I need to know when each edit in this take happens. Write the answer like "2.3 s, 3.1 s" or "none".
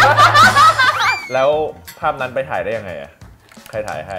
1.2 s